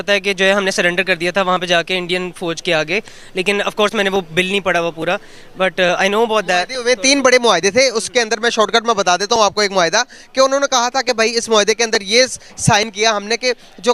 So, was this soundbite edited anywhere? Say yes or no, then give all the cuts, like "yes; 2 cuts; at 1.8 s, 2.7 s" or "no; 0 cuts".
no; 0 cuts